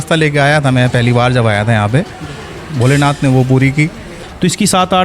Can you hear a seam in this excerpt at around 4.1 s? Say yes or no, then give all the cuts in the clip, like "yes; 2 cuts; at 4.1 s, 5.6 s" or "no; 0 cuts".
yes; 1 cut; at 4.1 s